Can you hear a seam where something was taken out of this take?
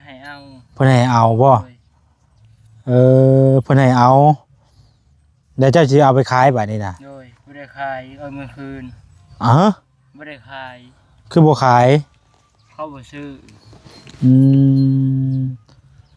no; 0 cuts

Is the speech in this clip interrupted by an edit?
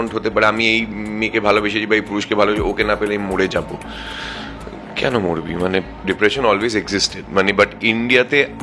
yes; 1 cut; at 5.9 s

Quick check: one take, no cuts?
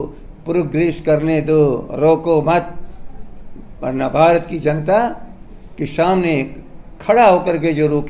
yes; 0 cuts

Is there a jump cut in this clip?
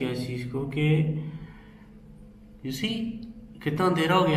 no; 0 cuts

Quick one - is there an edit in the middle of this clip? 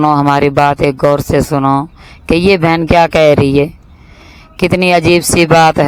no; 0 cuts

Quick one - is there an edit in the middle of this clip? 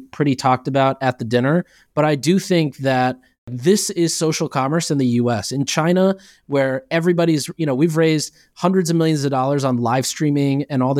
yes; 1 cut; at 3.5 s

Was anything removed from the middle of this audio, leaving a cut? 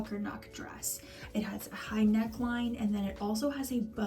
no; 0 cuts

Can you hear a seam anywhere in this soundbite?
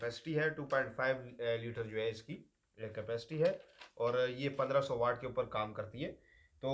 no; 0 cuts

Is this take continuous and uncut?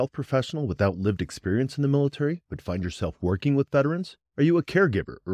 yes; 0 cuts

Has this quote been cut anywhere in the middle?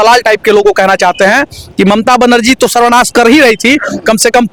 no; 0 cuts

